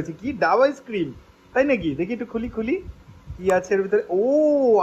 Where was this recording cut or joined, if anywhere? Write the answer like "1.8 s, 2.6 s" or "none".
none